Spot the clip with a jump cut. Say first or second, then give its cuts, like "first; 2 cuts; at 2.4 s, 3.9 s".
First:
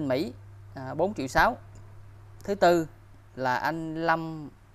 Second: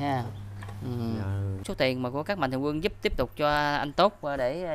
second; 1 cut; at 1.6 s